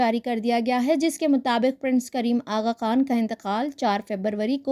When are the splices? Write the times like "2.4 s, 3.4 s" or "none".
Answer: none